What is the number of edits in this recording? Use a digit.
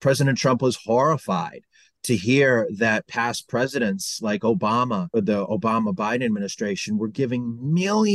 1